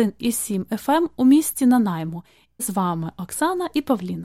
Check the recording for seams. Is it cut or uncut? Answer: cut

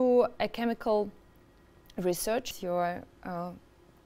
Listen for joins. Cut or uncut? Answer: cut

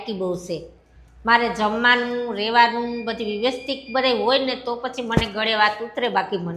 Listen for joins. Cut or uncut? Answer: uncut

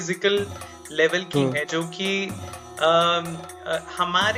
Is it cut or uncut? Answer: uncut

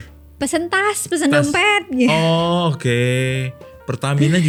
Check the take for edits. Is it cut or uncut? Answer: uncut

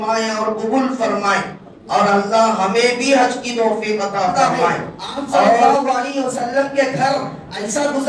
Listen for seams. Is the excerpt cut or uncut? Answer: cut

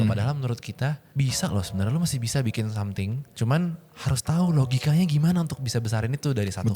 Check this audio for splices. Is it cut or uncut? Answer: cut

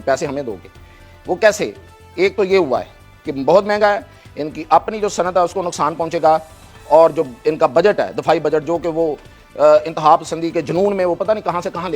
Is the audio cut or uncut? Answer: uncut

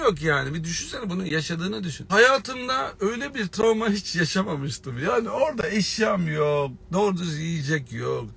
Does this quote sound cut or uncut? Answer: cut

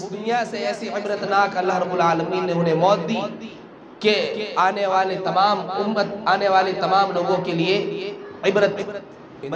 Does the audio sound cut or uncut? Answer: uncut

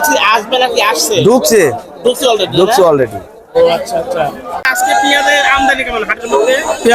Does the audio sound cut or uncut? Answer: cut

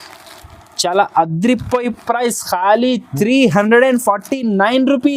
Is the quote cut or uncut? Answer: uncut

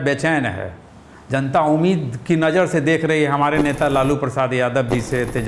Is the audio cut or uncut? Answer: uncut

